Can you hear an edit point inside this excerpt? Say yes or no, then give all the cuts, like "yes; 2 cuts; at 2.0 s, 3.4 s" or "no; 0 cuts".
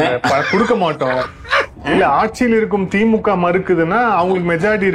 yes; 1 cut; at 1.8 s